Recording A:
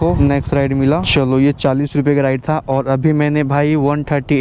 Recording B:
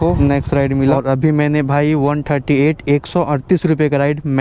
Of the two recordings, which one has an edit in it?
B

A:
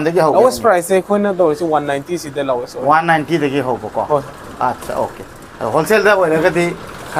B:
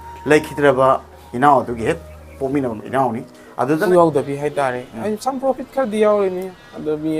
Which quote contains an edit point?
B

